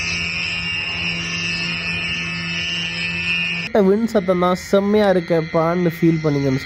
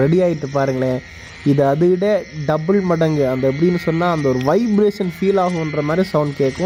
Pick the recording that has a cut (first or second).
first